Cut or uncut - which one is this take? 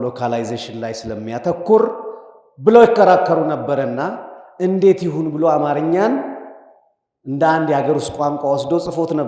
uncut